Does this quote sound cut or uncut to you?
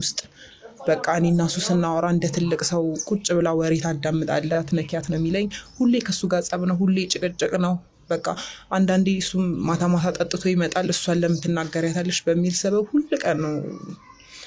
cut